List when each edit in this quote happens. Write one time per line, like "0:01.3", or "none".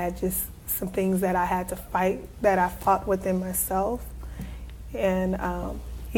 0:02.8